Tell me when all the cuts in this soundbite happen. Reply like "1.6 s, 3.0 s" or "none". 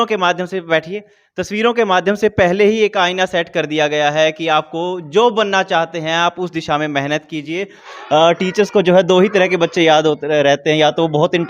7.9 s